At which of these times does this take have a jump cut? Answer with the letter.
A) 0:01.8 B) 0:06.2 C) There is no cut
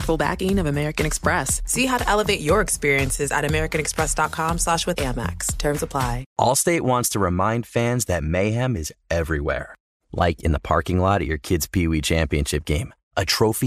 B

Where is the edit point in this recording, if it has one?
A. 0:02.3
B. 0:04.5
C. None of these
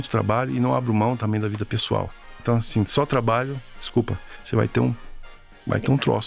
A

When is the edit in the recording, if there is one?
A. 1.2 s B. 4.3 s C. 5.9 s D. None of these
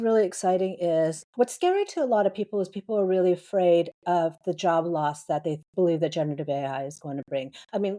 A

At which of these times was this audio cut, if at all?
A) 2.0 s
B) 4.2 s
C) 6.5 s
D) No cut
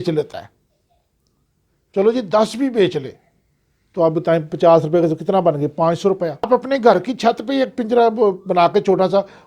C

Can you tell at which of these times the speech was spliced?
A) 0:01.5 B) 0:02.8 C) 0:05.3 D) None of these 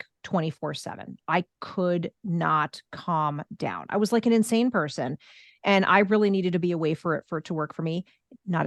D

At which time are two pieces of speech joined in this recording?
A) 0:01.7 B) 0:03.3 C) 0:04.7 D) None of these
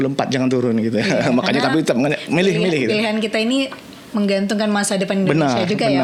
D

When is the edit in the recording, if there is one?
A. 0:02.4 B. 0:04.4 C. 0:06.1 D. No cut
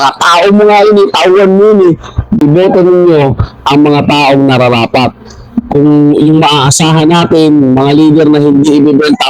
A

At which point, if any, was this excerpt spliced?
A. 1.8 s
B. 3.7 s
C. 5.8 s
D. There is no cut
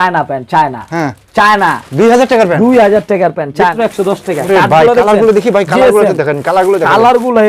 B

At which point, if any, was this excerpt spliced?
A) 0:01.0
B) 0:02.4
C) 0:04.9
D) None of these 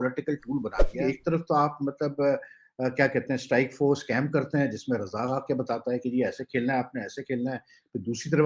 A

